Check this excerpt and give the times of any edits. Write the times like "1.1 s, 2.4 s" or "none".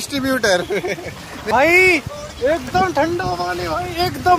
1.3 s